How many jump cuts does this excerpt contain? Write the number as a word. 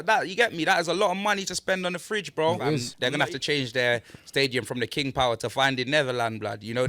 one